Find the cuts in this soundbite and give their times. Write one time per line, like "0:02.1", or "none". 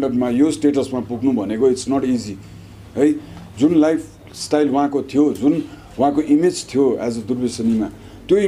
none